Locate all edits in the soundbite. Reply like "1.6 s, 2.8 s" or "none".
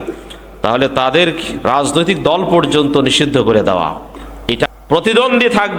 4.7 s